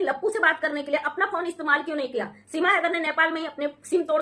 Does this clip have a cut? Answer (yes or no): no